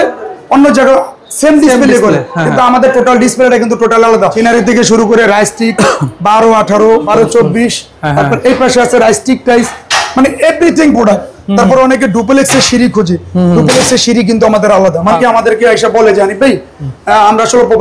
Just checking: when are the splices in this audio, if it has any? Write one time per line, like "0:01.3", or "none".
0:04.3
0:07.1
0:15.2